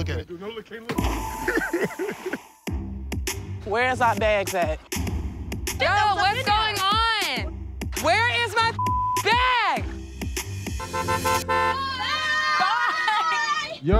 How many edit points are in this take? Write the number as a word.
one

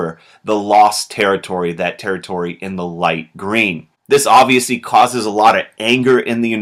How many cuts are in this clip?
zero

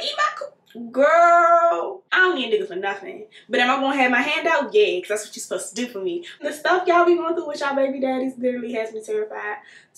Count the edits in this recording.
two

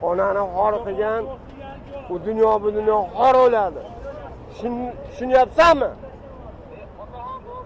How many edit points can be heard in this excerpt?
zero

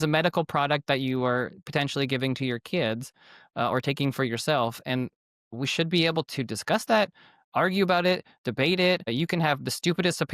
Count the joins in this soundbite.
one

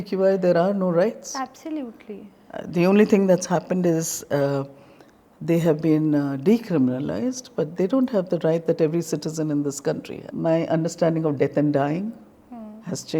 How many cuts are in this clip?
one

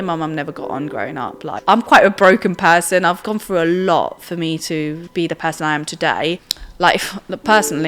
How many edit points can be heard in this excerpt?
four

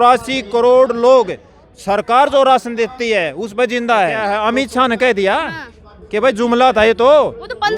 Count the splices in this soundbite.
one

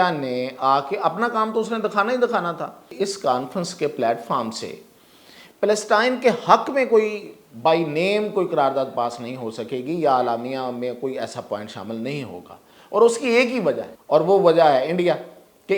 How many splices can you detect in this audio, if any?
two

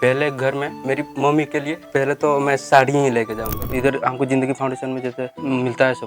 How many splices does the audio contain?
three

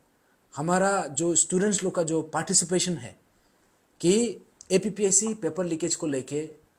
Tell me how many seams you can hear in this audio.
zero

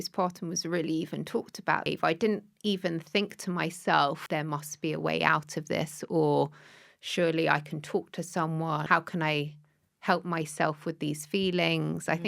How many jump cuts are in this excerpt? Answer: three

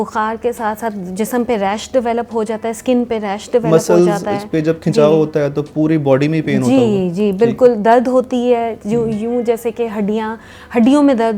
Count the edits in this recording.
zero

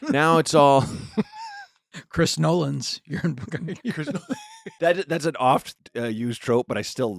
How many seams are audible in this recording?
two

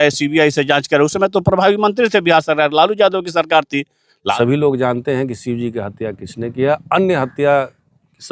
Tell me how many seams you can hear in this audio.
one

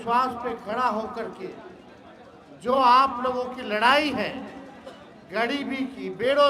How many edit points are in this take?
zero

